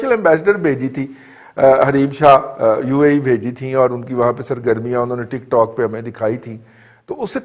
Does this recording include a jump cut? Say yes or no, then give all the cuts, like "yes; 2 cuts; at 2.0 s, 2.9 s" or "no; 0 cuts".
no; 0 cuts